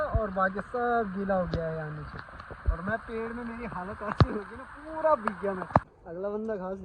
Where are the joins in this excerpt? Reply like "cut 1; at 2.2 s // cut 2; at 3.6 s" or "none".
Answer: cut 1; at 5.9 s